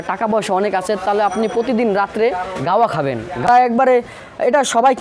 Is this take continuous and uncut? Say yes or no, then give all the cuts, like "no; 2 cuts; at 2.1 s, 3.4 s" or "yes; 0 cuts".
no; 1 cut; at 3.5 s